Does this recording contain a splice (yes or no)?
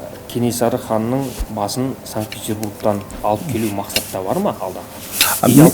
yes